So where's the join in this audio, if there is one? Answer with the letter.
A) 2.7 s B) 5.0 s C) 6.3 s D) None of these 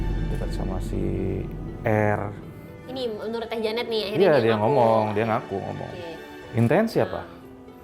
C